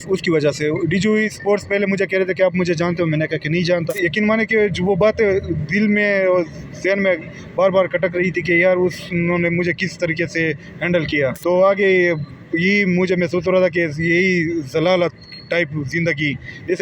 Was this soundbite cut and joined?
yes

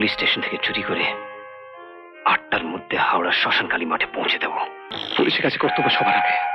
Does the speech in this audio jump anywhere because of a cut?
yes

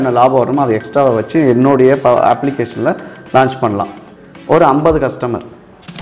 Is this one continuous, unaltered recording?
no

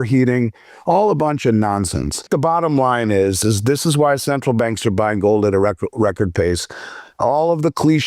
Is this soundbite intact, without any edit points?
no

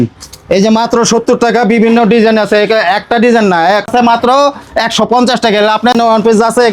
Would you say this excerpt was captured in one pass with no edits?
no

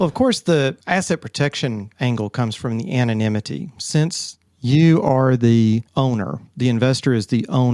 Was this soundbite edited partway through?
yes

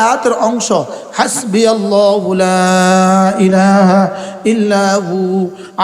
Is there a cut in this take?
no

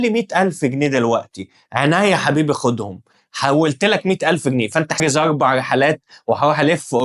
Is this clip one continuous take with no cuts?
no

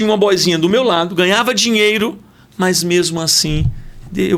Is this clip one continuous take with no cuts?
yes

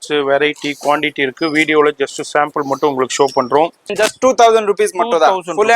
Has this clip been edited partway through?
yes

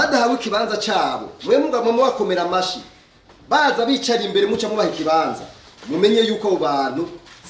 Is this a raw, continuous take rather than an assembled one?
yes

